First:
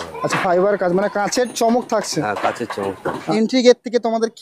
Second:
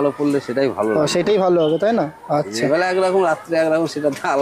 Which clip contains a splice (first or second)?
first